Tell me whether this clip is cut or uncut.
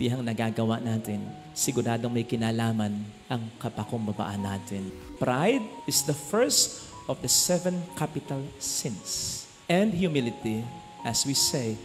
cut